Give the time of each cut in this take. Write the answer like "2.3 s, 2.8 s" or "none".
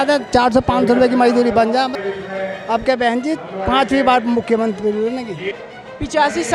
2.0 s, 5.6 s